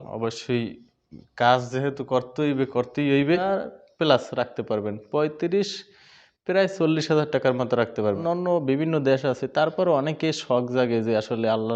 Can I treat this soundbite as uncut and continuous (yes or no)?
no